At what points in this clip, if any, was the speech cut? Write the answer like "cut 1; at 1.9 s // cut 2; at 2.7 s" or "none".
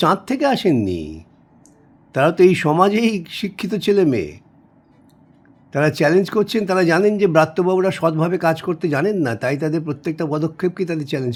none